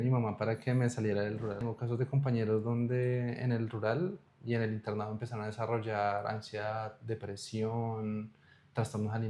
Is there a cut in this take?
yes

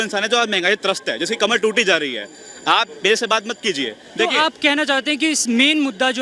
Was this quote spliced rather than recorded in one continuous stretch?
no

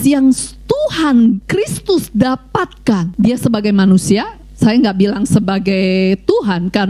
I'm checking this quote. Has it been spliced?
yes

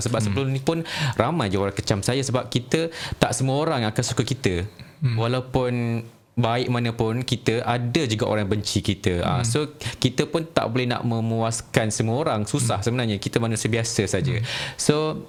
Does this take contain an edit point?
no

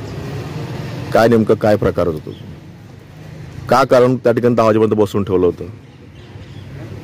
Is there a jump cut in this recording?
no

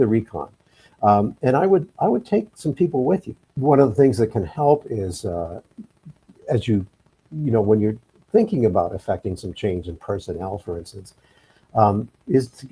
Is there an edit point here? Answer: yes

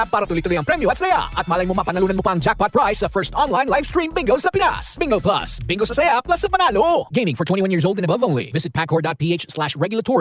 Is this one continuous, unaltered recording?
yes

